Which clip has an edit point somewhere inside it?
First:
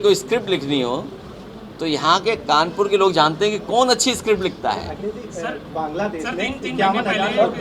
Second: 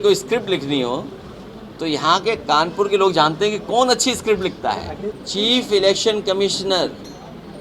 second; 1 cut; at 5.2 s

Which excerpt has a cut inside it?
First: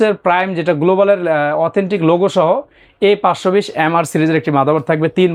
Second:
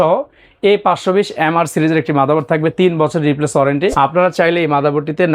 second; 1 cut; at 3.9 s

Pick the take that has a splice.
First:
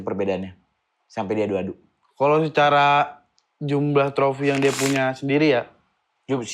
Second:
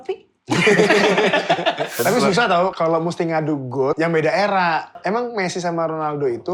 second; 4 cuts; at 2.0 s, 2.7 s, 4.0 s, 5.0 s

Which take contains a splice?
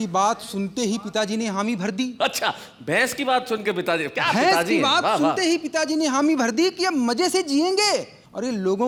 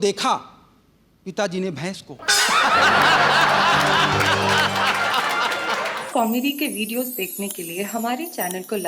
second; 1 cut; at 5.9 s

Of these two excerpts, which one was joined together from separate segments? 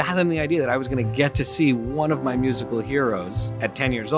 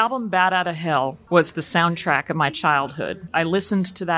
second; 2 cuts; at 1.2 s, 3.3 s

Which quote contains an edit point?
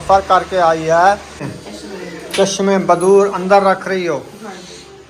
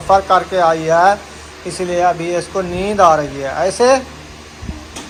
first; 1 cut; at 1.6 s

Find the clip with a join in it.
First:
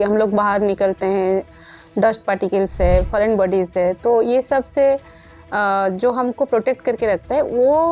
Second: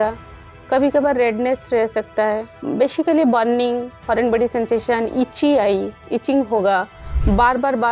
second; 1 cut; at 2.6 s

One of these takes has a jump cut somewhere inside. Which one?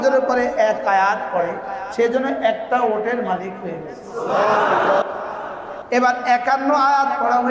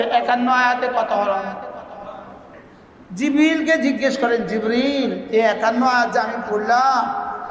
second; 1 cut; at 2.5 s

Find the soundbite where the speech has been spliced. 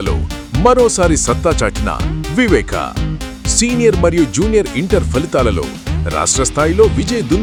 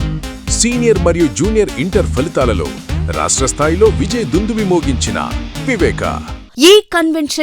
second; 1 cut; at 6.4 s

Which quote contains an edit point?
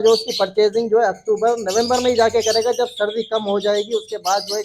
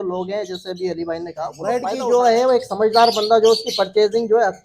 second; 1 cut; at 1.7 s

